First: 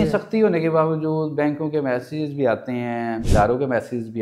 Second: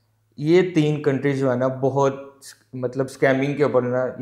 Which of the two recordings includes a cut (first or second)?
first